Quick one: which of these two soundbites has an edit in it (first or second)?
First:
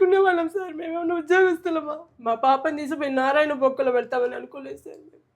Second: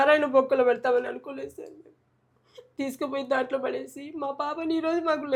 first